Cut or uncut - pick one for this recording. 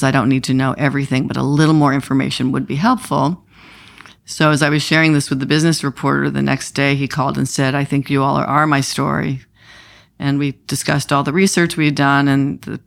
uncut